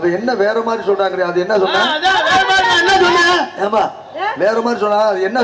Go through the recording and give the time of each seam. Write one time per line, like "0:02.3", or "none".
none